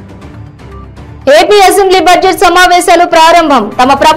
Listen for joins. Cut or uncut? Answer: uncut